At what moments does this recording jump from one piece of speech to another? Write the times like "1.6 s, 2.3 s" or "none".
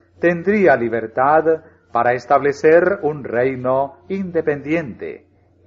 3.1 s